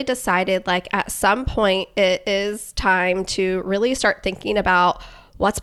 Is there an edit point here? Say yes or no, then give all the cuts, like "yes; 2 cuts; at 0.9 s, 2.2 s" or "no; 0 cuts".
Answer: no; 0 cuts